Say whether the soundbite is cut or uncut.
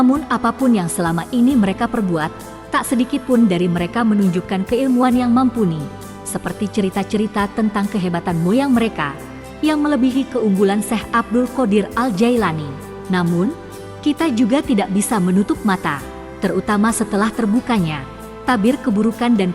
cut